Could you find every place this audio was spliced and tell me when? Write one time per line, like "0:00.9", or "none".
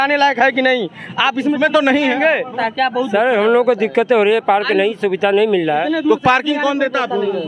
0:02.6